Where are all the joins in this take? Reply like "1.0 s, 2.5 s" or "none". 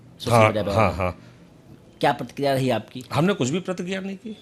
none